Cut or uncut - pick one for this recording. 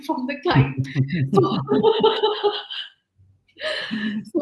uncut